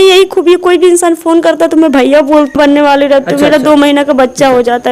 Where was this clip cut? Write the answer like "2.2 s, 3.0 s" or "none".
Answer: 2.6 s

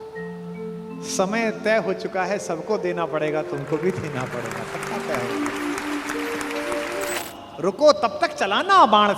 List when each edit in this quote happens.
7.2 s

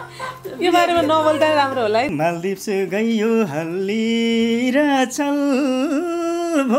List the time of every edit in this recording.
2.1 s

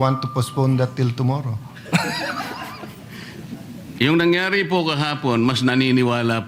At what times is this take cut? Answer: 3.6 s

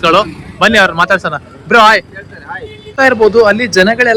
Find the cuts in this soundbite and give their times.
3.1 s

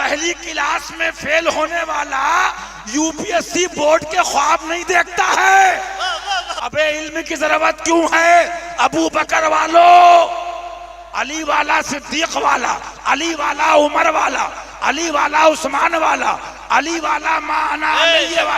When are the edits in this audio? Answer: 6.5 s

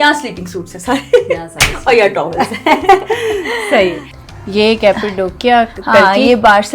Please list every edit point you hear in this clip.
4.0 s

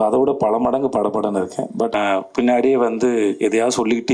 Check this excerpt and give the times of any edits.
1.9 s

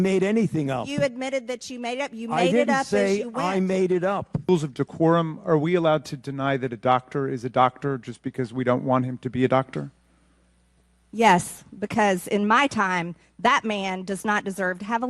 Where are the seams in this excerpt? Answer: 4.5 s

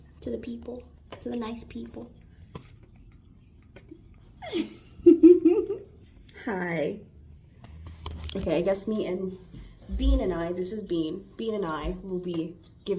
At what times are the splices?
none

